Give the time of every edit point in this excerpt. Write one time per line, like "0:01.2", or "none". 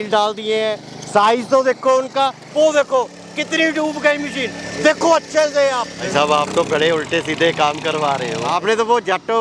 0:02.4
0:06.1
0:08.5